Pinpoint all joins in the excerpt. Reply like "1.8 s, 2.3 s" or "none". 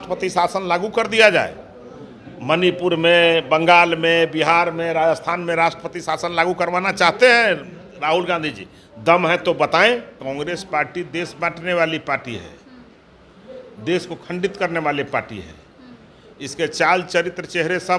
10.1 s